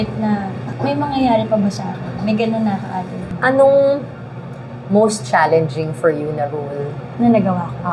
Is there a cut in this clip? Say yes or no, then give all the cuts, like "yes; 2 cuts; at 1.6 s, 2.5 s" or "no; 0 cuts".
yes; 1 cut; at 3.4 s